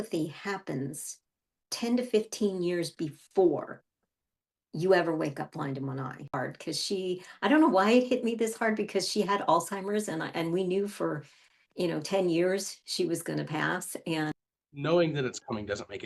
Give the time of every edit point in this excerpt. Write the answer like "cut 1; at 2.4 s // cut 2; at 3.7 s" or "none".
cut 1; at 6.3 s // cut 2; at 14.3 s